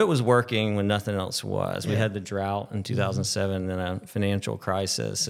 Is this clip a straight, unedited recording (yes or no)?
yes